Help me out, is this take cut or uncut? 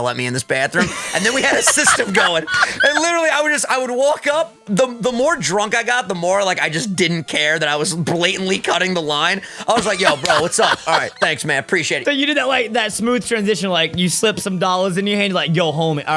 cut